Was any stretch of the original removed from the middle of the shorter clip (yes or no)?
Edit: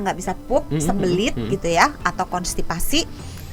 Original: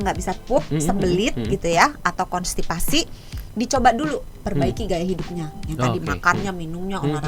no